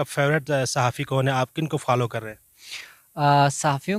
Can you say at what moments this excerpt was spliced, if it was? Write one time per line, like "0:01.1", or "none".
none